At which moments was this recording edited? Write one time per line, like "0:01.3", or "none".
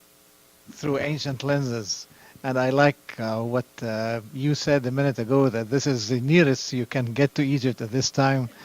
0:07.1